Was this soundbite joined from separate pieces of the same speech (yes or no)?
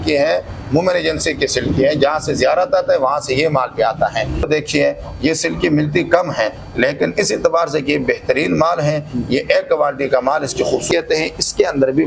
yes